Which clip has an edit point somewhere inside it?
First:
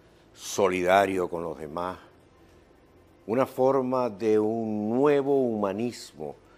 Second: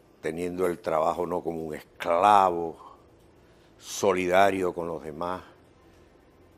second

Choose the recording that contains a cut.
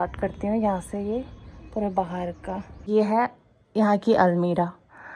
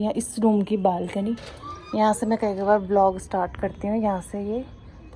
first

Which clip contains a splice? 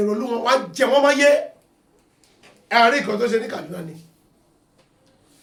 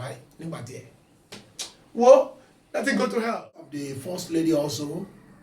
second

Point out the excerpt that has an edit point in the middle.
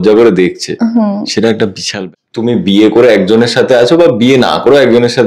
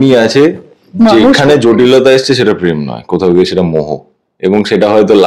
first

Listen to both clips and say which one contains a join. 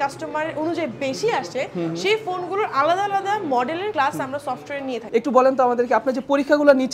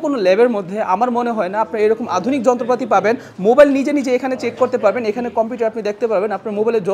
first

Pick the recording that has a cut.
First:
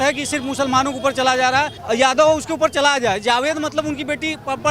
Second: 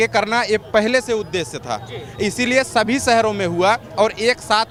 first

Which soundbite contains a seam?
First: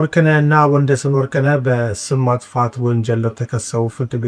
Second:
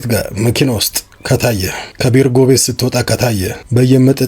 second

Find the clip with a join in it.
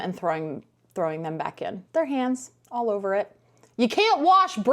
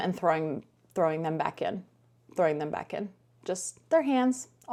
first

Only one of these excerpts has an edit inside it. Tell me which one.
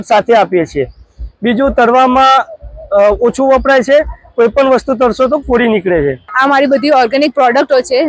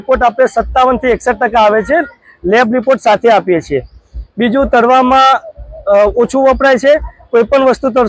first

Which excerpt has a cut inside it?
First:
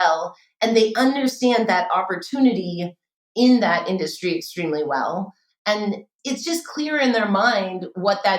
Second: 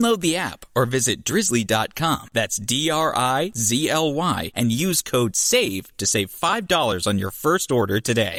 first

